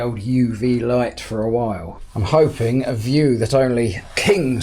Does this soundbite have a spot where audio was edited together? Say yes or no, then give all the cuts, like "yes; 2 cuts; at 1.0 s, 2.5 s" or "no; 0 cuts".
yes; 1 cut; at 2.0 s